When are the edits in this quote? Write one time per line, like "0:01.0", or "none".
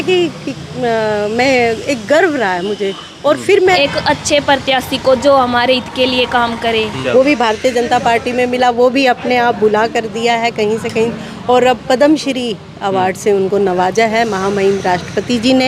0:03.8
0:07.0